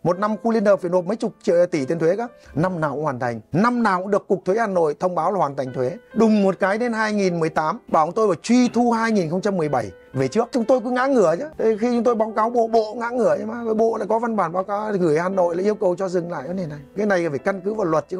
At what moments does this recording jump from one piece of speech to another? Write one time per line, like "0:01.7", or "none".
0:03.4
0:06.0
0:07.8
0:10.5
0:11.5